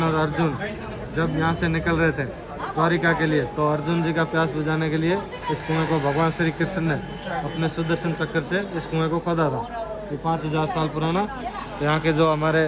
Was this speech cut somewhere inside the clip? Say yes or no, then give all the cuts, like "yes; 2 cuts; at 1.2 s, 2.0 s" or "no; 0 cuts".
no; 0 cuts